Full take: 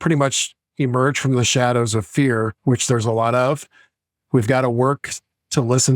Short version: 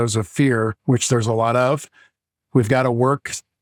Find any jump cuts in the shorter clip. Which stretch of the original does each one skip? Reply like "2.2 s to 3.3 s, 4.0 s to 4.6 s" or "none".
none